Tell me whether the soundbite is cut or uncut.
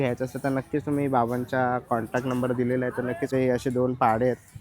cut